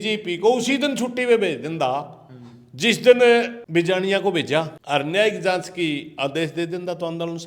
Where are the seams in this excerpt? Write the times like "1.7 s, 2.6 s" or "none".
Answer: 3.6 s, 4.8 s